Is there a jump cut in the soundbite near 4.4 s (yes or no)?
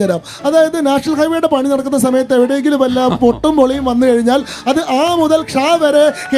no